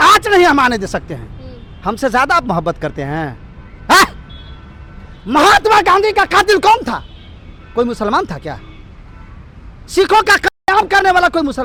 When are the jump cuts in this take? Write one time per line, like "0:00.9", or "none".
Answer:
none